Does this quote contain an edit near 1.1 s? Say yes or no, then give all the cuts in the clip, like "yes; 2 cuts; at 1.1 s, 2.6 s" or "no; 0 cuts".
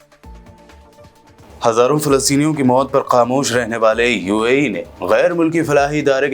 yes; 1 cut; at 1.1 s